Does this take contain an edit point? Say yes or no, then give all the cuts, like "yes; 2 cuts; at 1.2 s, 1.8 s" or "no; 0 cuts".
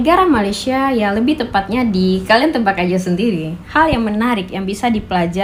no; 0 cuts